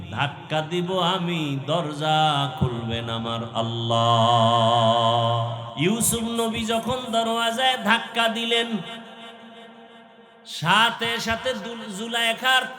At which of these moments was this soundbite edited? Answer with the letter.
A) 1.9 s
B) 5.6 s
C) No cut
B